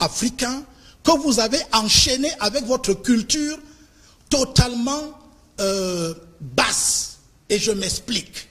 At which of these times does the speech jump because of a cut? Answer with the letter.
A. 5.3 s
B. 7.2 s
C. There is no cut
C